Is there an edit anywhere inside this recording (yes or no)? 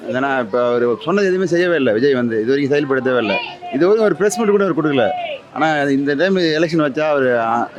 no